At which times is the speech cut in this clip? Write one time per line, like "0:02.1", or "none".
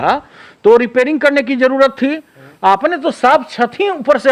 none